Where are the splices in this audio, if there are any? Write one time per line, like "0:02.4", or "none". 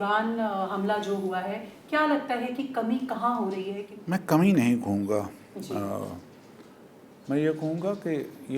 0:03.9

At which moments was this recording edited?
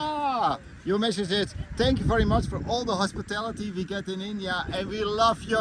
none

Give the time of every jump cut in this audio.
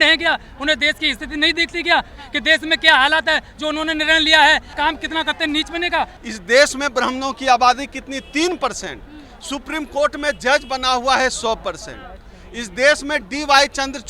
0:04.7
0:06.2

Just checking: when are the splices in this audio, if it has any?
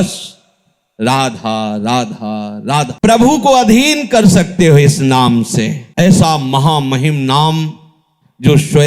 0:02.9
0:05.8

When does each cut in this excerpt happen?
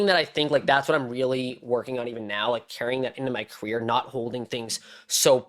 none

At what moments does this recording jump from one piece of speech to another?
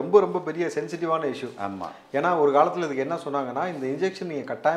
none

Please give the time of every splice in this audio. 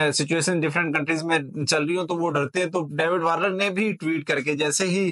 none

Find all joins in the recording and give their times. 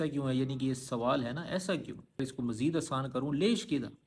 0:02.2

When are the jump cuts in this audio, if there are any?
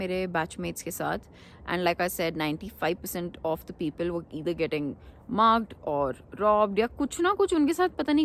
none

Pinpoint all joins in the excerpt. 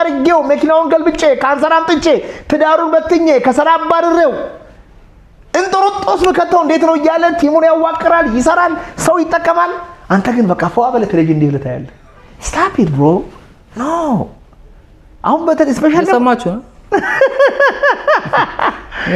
none

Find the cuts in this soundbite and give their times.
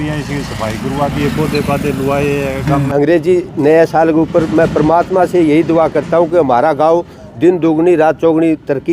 0:02.9

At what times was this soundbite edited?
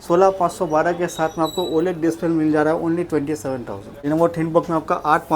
0:03.9

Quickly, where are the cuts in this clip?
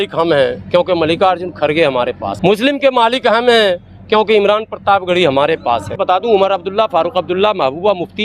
0:02.3
0:06.0

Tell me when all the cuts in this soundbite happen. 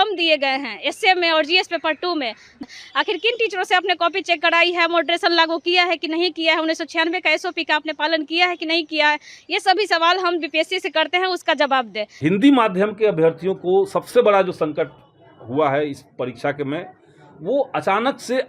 0:02.5
0:12.0

